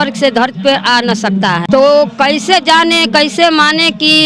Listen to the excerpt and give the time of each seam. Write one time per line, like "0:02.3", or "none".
0:01.6